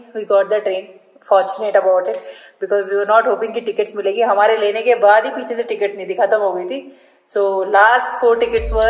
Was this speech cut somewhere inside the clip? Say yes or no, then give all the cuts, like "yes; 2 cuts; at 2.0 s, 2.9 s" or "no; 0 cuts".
no; 0 cuts